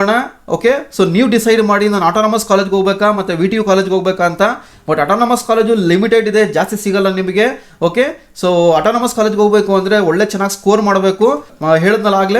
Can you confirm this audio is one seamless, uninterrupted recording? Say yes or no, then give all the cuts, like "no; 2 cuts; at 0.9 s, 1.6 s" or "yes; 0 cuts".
no; 1 cut; at 11.5 s